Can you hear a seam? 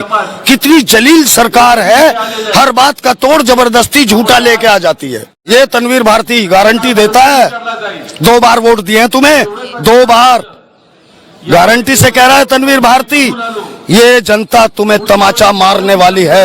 yes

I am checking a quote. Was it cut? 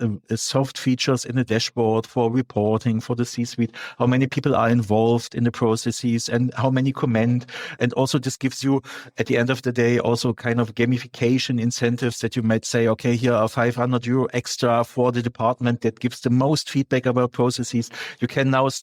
no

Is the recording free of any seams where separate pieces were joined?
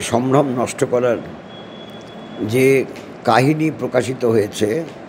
yes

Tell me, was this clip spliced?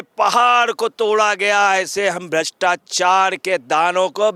no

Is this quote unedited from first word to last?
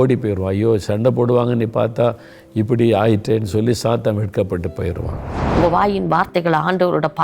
no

